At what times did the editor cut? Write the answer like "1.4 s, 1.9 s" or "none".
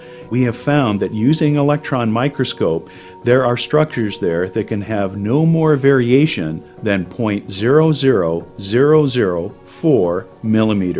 5.2 s